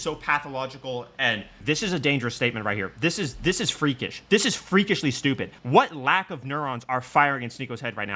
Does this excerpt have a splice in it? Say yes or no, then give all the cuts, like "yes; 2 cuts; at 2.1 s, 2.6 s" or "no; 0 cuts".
no; 0 cuts